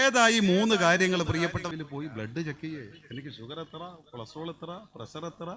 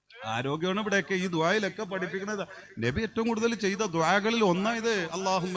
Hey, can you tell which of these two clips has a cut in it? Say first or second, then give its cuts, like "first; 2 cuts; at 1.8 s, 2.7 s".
first; 1 cut; at 1.7 s